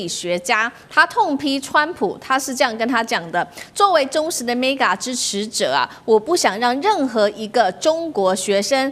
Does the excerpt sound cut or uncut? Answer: uncut